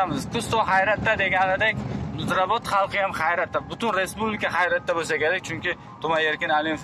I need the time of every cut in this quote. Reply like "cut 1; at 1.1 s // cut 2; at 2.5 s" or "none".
none